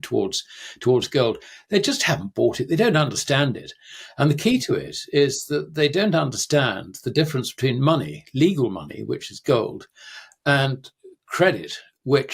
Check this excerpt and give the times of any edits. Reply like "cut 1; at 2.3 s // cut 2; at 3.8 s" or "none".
none